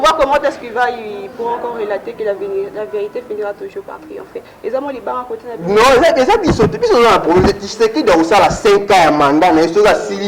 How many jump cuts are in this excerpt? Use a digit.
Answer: 0